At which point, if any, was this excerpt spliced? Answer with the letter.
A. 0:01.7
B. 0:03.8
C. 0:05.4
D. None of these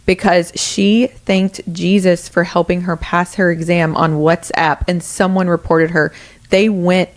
D